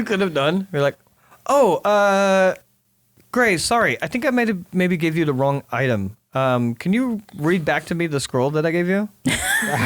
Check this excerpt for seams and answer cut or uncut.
uncut